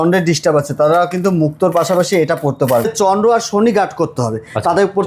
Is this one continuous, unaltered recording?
no; 1 cut; at 2.9 s

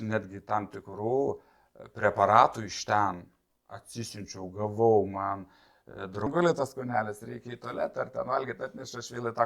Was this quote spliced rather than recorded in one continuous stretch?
yes; 1 cut; at 6.3 s

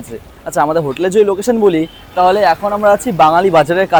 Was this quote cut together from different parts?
no; 0 cuts

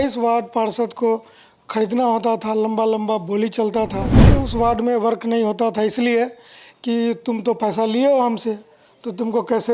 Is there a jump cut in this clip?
yes; 1 cut; at 4.2 s

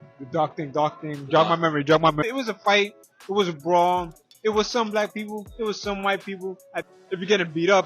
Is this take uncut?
no; 2 cuts; at 2.3 s, 6.9 s

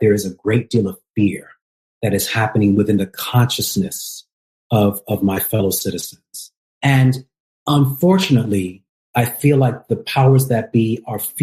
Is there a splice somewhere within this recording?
no; 0 cuts

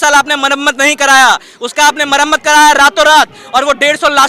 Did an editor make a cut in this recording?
no; 0 cuts

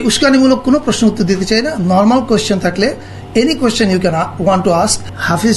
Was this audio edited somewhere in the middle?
no; 0 cuts

